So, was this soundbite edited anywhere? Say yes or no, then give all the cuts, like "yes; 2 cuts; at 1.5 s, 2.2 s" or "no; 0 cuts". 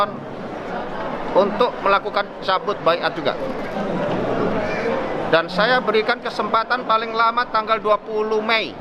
no; 0 cuts